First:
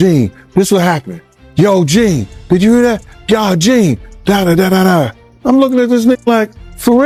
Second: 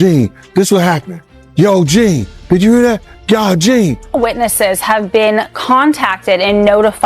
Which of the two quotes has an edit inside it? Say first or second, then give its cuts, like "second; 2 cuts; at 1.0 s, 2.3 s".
second; 1 cut; at 4.2 s